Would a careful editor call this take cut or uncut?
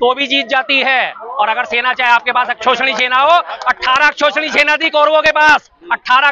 uncut